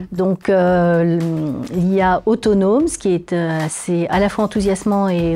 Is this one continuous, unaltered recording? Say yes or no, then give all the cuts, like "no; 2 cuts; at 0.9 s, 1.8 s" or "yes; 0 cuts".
yes; 0 cuts